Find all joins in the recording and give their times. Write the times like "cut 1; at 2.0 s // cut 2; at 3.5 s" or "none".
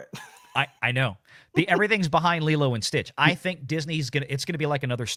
none